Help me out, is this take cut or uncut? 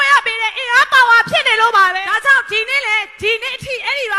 uncut